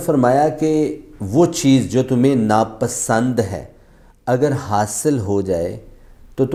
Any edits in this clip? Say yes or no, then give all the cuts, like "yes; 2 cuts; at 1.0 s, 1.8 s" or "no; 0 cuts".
no; 0 cuts